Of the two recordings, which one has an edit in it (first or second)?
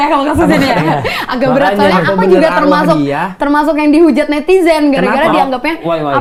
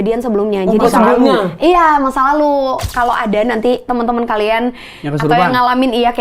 second